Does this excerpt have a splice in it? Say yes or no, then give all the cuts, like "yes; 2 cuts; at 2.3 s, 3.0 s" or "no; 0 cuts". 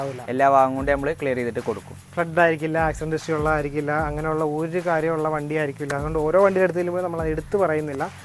no; 0 cuts